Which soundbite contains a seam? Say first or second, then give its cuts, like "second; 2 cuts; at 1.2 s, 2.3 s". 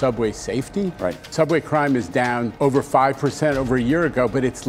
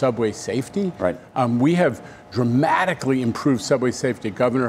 first; 2 cuts; at 1.2 s, 2.5 s